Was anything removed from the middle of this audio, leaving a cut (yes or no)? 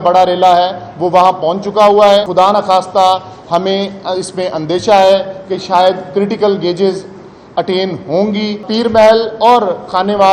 yes